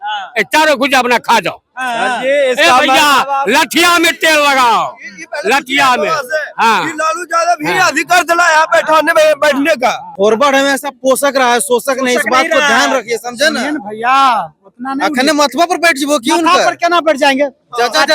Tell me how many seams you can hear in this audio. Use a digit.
1